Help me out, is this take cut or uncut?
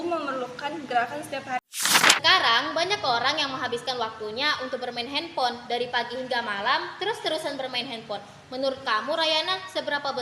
cut